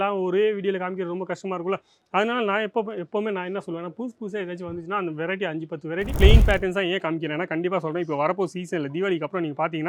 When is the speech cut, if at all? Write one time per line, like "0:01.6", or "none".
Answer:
0:06.1